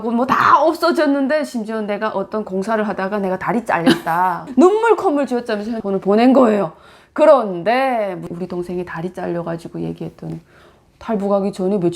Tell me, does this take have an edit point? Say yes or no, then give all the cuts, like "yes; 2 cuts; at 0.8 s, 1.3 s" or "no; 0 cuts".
yes; 4 cuts; at 4.4 s, 5.7 s, 8.3 s, 10.5 s